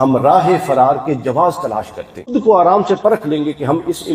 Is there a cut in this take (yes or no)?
yes